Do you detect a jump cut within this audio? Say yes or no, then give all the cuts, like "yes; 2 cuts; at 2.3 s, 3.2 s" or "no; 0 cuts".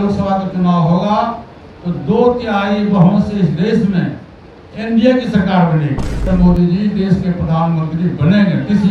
yes; 1 cut; at 6.3 s